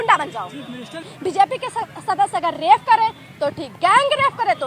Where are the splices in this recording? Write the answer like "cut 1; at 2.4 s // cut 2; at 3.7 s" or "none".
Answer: cut 1; at 1.1 s